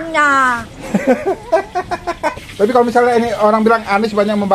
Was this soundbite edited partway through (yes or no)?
yes